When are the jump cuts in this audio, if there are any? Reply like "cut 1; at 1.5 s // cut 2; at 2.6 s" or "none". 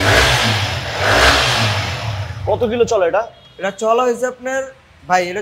none